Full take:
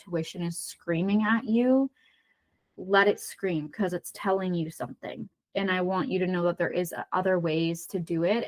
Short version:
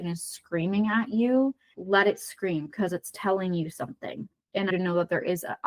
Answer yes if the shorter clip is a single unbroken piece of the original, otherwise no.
no